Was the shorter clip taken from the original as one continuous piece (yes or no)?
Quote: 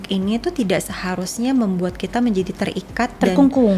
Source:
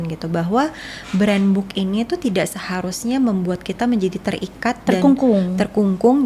yes